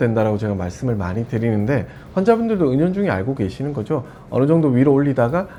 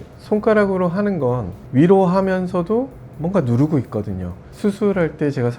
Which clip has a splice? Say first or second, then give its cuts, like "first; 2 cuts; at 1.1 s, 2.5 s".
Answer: second; 2 cuts; at 1.5 s, 4.5 s